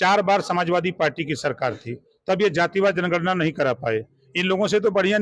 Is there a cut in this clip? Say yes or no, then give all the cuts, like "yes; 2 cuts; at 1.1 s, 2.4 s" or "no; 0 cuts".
no; 0 cuts